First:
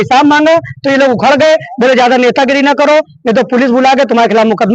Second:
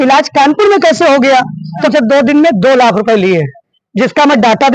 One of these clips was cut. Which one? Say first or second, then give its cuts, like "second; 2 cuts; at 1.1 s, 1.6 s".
second; 1 cut; at 1.9 s